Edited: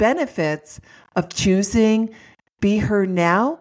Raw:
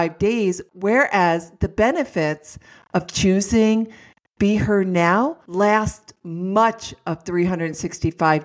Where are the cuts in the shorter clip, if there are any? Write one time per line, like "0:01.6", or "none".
none